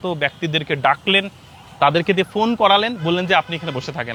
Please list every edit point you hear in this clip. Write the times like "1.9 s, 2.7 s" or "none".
none